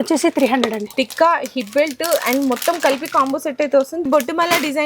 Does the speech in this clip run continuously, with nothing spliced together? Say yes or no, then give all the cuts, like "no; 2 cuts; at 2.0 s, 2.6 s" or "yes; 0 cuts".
no; 2 cuts; at 0.9 s, 4.1 s